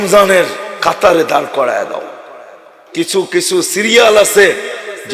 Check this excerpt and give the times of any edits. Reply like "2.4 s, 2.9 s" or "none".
2.8 s